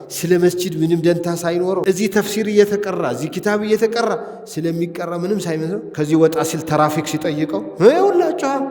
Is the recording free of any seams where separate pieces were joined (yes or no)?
no